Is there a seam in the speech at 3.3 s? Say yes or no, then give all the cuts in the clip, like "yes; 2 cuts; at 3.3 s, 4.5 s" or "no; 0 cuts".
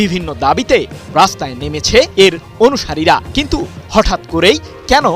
no; 1 cut; at 2.1 s